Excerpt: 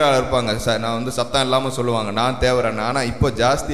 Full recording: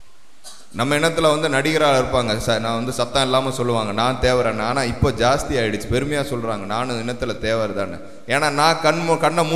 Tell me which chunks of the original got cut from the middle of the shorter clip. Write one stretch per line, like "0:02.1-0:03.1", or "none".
none